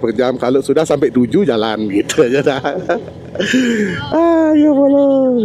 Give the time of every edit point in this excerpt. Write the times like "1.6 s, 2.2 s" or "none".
none